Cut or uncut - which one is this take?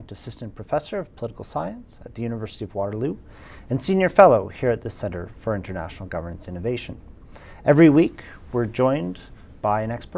cut